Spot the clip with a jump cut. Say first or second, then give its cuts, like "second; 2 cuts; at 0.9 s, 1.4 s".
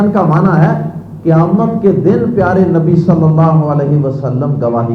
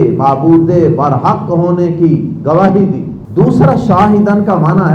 second; 1 cut; at 3.1 s